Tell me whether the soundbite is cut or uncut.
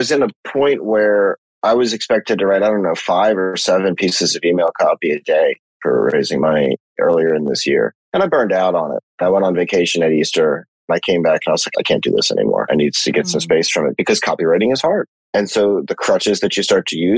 cut